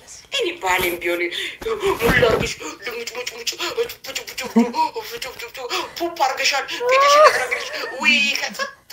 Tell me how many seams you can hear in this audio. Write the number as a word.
zero